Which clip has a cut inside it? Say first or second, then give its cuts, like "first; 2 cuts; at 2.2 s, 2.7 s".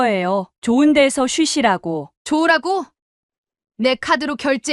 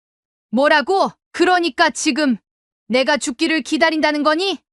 second; 1 cut; at 1.2 s